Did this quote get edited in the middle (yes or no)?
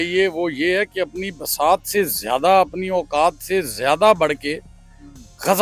no